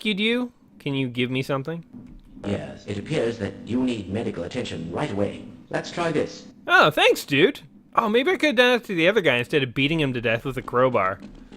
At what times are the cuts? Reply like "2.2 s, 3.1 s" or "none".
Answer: 10.4 s